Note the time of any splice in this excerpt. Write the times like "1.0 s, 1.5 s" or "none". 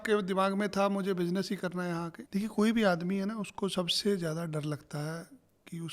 2.2 s